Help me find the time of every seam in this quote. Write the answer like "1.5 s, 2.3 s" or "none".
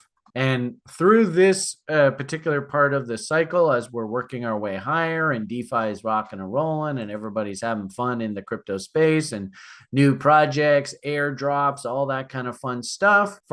none